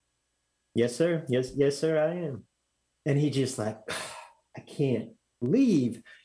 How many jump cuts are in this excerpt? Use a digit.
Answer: 1